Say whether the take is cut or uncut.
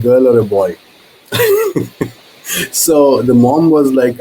uncut